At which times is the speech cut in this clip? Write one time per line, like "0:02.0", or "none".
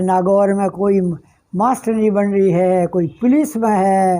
none

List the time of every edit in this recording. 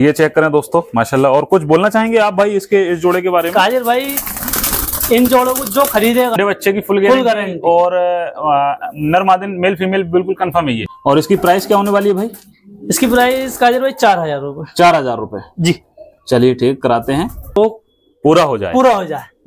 0:06.4
0:10.8
0:17.6

